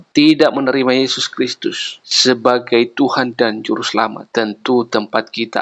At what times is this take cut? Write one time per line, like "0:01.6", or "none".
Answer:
none